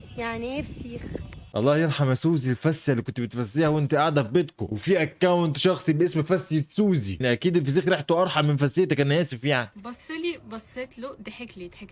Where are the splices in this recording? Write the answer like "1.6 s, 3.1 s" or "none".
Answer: 9.8 s